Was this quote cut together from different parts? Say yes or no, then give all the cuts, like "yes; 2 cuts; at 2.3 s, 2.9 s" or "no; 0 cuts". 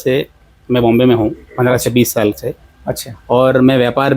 no; 0 cuts